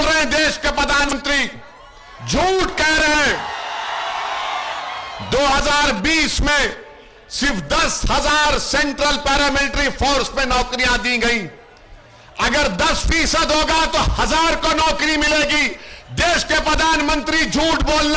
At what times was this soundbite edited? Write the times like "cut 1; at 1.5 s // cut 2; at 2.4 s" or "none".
cut 1; at 1.1 s